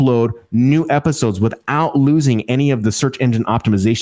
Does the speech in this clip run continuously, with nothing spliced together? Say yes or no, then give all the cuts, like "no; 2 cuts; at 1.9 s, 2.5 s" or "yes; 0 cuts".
yes; 0 cuts